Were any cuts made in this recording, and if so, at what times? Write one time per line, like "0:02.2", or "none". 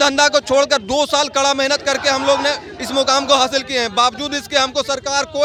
none

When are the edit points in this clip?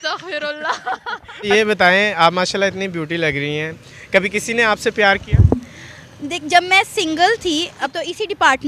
0:01.5
0:07.9

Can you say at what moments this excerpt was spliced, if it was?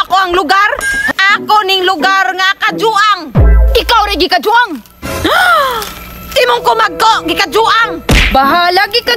0:01.1

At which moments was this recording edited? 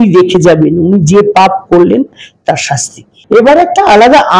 0:03.2

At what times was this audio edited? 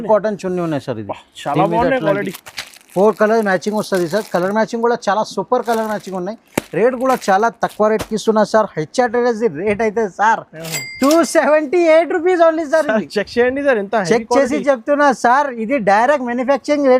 none

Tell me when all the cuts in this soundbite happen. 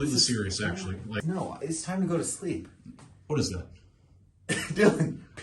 0:01.2

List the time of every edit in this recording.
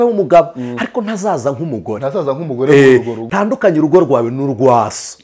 0:03.2

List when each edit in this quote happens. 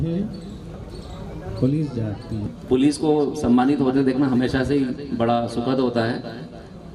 0:02.6

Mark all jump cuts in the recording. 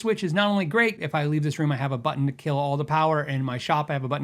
0:01.0

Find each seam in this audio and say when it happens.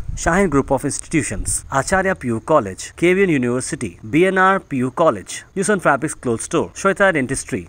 none

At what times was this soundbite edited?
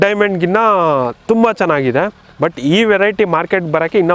none

